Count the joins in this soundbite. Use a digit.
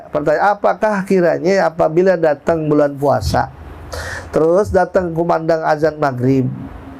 0